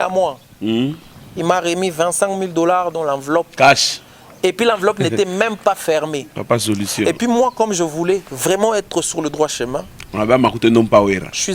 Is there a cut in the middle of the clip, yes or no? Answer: no